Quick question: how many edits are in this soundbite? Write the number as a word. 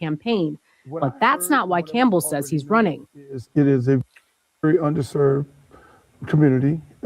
one